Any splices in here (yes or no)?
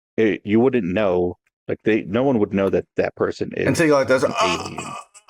no